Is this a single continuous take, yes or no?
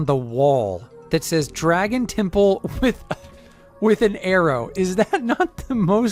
yes